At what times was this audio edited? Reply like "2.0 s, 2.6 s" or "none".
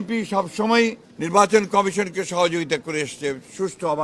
1.1 s